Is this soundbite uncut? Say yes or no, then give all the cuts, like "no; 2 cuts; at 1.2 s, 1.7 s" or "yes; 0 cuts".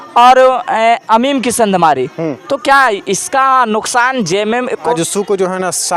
no; 1 cut; at 4.8 s